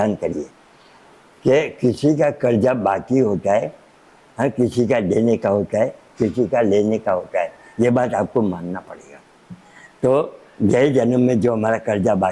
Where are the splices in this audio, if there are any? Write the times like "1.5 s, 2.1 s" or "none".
none